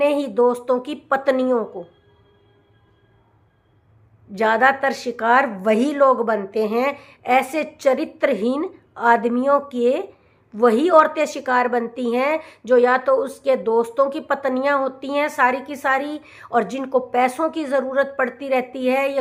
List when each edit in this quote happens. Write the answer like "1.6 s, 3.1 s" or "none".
none